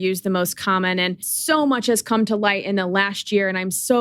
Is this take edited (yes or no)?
no